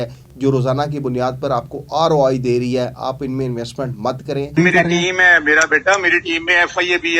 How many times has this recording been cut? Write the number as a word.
one